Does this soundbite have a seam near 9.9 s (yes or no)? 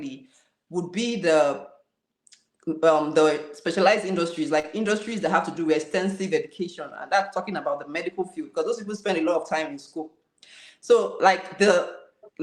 no